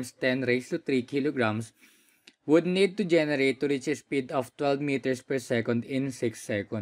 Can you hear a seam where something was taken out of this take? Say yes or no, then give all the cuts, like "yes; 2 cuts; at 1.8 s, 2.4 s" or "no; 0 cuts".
no; 0 cuts